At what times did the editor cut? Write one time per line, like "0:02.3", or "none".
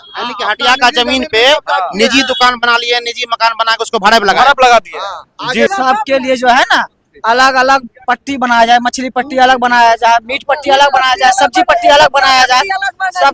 0:05.7